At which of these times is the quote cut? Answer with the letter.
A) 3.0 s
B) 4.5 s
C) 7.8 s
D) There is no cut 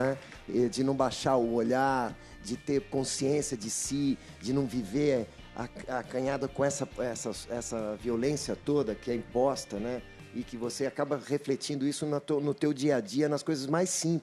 D